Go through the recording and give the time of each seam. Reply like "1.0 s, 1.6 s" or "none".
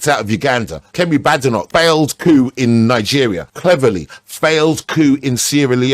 3.5 s